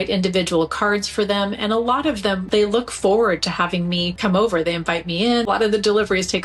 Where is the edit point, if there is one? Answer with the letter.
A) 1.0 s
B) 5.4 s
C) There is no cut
B